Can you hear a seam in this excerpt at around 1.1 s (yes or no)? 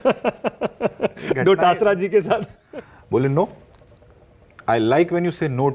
no